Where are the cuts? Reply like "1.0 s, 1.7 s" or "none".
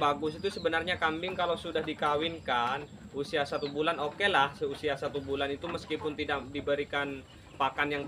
none